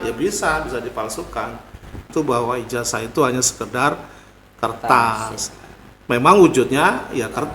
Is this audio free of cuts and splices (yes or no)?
no